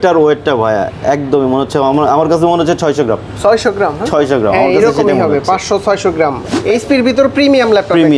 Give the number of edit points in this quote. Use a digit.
1